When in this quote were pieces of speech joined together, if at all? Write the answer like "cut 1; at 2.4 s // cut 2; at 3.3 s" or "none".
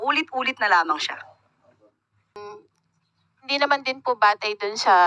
cut 1; at 2.4 s